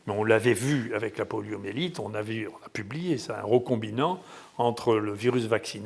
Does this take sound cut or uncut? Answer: uncut